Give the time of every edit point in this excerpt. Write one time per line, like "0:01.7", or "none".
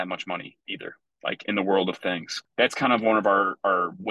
0:02.3